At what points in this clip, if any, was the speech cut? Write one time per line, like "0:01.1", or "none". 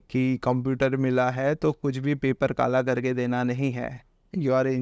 none